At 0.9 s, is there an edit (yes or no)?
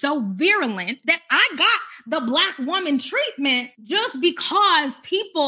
yes